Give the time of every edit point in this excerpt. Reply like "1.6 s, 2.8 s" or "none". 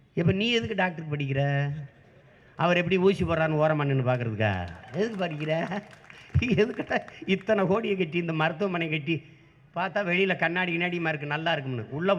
none